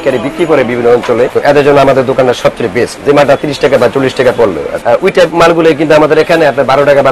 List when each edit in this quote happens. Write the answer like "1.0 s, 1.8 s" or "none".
1.3 s, 3.0 s, 4.7 s